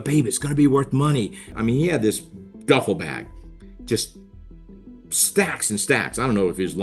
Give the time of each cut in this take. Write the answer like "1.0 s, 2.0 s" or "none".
1.5 s